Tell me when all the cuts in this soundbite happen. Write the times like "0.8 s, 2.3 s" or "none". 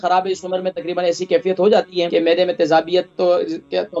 2.1 s